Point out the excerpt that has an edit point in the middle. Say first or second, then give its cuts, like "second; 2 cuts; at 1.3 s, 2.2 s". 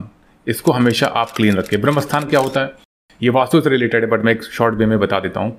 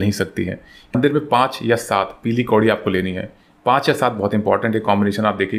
second; 1 cut; at 0.9 s